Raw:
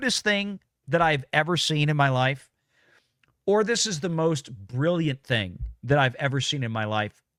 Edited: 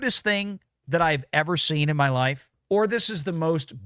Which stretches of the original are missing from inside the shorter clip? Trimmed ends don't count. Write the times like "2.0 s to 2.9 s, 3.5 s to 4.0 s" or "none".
2.5 s to 3.3 s

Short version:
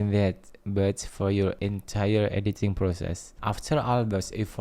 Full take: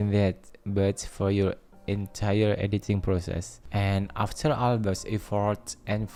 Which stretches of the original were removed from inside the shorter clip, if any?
1.6 s to 1.9 s, 3.6 s to 4.1 s

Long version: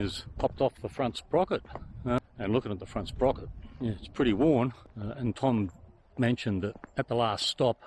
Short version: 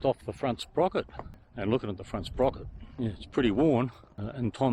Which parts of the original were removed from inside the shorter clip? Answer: 2.0 s to 2.3 s

